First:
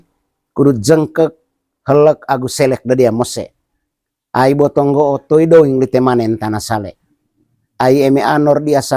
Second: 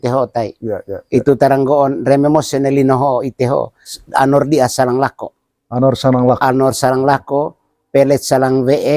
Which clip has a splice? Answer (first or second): second